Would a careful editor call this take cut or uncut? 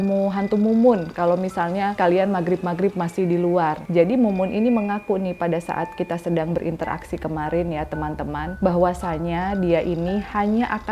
cut